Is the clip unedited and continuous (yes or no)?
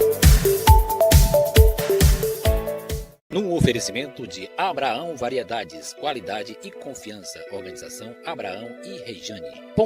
no